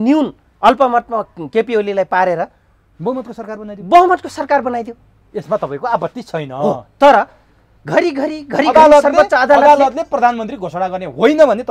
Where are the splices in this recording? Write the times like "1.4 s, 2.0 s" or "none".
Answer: none